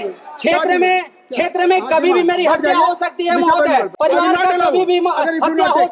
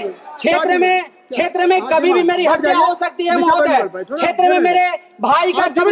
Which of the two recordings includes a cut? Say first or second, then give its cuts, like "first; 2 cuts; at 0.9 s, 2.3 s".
first; 1 cut; at 3.9 s